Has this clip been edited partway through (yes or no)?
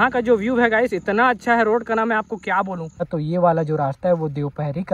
yes